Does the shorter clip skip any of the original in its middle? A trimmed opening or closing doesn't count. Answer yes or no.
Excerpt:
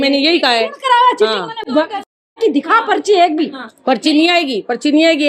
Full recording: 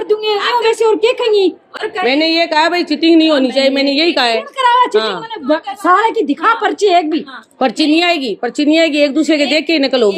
no